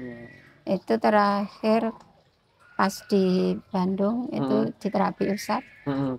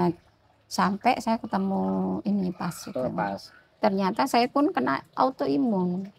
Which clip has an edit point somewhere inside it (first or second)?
second